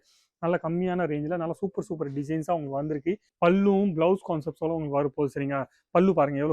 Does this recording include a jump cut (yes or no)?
yes